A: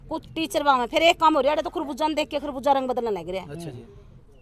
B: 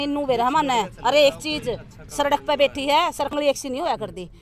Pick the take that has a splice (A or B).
B